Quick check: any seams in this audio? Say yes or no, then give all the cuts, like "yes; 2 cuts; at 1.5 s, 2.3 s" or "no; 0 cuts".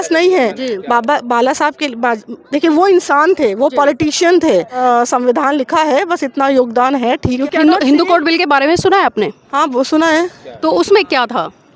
yes; 2 cuts; at 4.8 s, 7.4 s